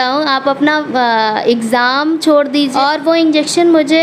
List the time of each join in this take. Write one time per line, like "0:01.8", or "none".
0:02.7